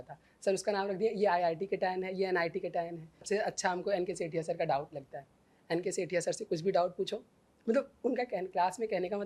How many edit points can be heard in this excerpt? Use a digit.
1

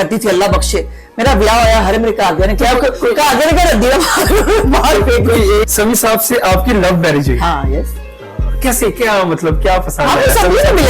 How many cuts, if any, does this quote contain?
1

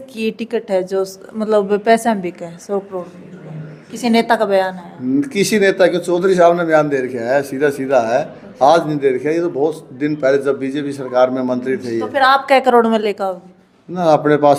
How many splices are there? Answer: 0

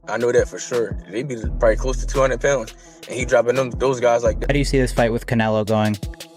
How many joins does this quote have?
1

